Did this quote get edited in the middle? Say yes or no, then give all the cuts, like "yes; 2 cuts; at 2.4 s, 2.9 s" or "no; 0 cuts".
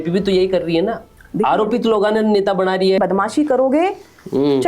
yes; 1 cut; at 3.0 s